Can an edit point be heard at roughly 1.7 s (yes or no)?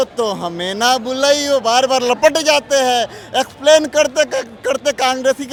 no